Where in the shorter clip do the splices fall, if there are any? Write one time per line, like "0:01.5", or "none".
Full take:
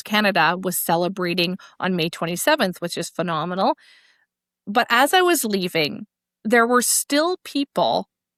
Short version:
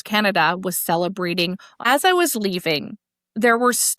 0:01.8